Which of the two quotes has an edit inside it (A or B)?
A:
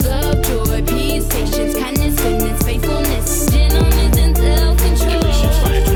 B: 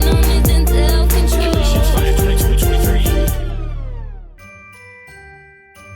B